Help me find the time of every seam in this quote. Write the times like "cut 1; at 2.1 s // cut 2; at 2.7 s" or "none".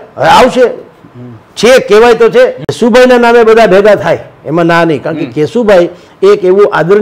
cut 1; at 2.7 s